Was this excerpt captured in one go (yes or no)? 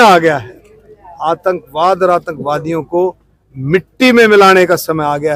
yes